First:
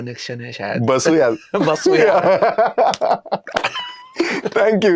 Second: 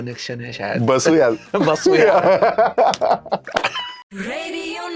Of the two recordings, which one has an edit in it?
second; 1 cut; at 4.0 s

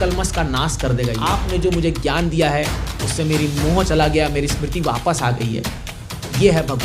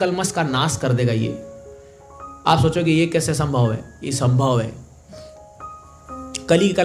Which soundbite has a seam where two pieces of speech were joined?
first; 1 cut; at 1.4 s

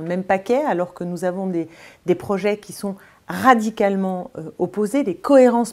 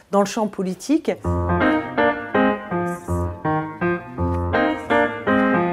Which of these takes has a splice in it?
second; 1 cut; at 1.2 s

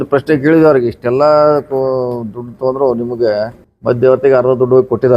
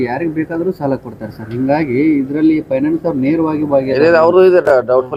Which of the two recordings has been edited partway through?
first; 1 cut; at 3.6 s

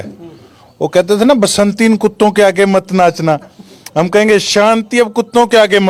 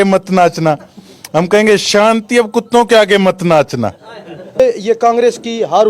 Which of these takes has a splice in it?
second; 1 cut; at 4.6 s

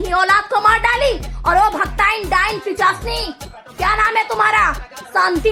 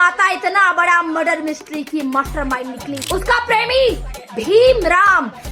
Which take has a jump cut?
second; 1 cut; at 3.0 s

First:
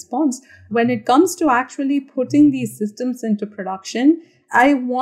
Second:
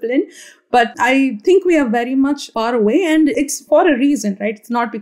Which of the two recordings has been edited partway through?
second; 3 cuts; at 0.9 s, 2.5 s, 3.4 s

